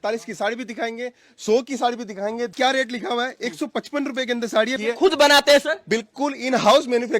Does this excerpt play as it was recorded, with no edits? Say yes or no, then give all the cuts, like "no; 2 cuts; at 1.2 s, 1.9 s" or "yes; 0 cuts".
no; 2 cuts; at 2.5 s, 4.8 s